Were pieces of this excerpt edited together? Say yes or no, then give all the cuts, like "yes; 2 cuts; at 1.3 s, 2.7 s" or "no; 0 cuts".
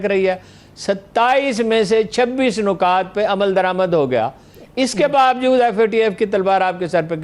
no; 0 cuts